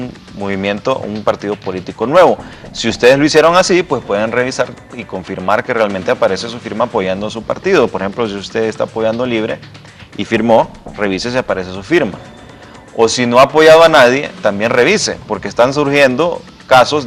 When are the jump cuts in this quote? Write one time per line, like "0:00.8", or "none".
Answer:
0:14.3